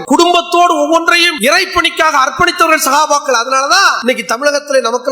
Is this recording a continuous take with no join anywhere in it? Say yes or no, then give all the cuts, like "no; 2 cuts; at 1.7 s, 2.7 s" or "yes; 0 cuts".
no; 2 cuts; at 1.3 s, 4.0 s